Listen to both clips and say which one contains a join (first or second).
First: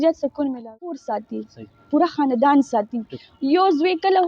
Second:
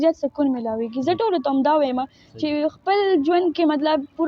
first